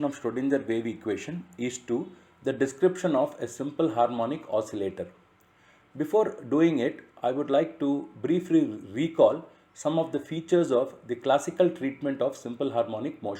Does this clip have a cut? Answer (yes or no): no